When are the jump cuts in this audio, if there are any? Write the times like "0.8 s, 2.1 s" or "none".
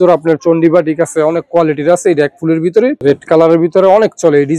3.0 s